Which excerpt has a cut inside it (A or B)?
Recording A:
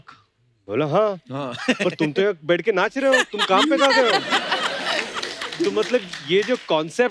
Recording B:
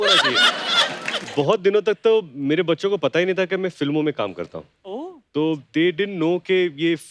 B